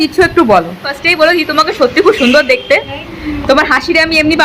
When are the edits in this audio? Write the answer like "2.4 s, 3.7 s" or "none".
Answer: 1.0 s